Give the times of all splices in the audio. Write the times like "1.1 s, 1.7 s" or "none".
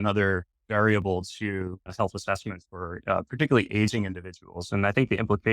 1.9 s